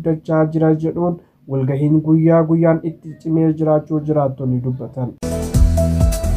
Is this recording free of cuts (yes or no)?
no